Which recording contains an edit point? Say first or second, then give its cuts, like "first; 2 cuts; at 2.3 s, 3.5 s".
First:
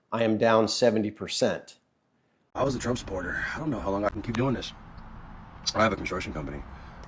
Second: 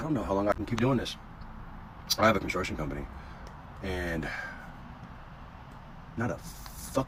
first; 1 cut; at 2.5 s